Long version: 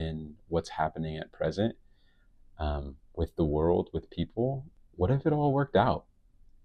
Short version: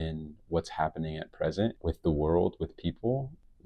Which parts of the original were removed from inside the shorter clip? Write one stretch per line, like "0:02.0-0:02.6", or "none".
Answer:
0:01.8-0:03.1